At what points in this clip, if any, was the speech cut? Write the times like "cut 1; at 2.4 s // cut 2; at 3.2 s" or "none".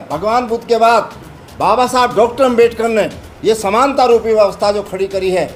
none